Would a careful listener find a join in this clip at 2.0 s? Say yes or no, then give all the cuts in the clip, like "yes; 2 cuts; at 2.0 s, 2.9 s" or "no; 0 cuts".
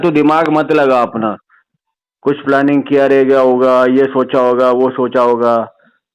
no; 0 cuts